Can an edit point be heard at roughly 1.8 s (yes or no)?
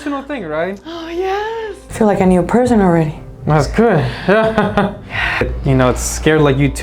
yes